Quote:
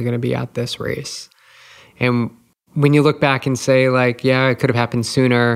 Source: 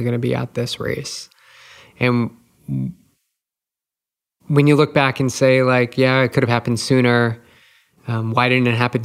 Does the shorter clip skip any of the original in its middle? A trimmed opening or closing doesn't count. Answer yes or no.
yes